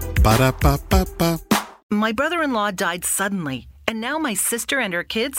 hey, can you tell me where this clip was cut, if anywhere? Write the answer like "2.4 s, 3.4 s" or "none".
1.7 s